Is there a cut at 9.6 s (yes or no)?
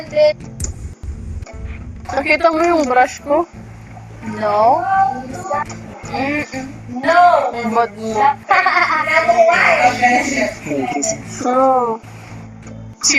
yes